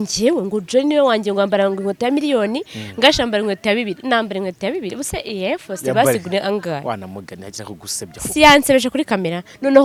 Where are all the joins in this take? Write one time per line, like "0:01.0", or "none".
none